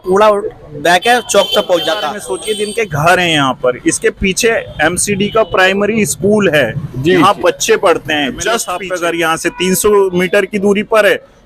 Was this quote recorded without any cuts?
no; 2 cuts; at 2.3 s, 8.8 s

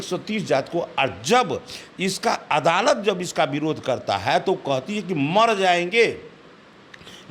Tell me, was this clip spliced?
no; 0 cuts

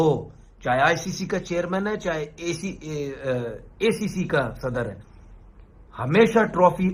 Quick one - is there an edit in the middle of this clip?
no; 0 cuts

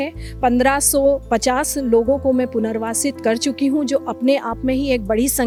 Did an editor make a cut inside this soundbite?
no; 0 cuts

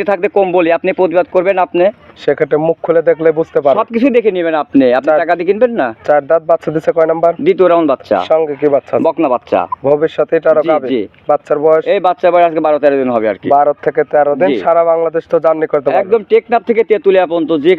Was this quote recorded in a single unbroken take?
yes; 0 cuts

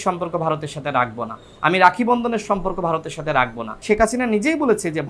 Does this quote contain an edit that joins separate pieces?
yes; 1 cut; at 3.7 s

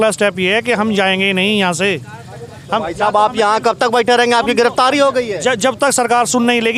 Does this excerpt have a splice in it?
no; 0 cuts

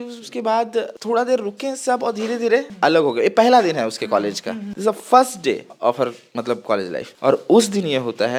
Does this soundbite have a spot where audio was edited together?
no; 0 cuts

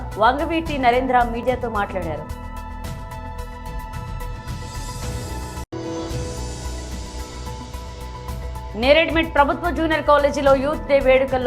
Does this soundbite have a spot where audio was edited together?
yes; 4 cuts; at 2.2 s, 3.7 s, 5.4 s, 7.1 s

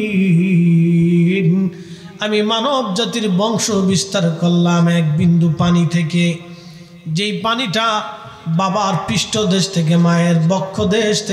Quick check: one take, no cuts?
yes; 0 cuts

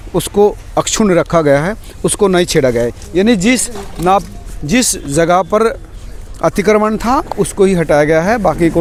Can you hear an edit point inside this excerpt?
no; 0 cuts

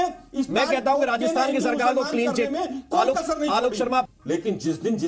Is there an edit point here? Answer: yes; 1 cut; at 4.2 s

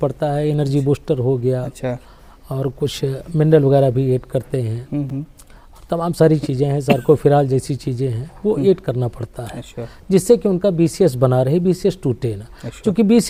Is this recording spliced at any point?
no; 0 cuts

